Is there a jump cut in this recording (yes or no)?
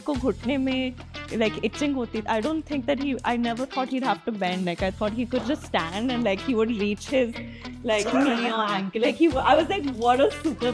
no